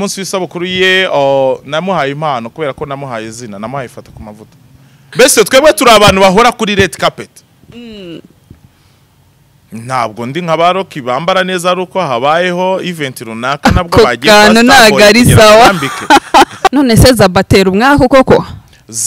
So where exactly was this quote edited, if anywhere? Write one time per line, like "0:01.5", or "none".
0:05.0
0:16.7